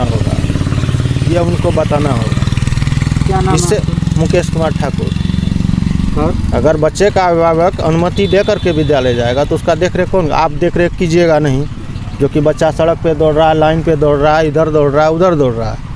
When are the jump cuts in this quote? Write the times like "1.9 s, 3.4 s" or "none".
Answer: none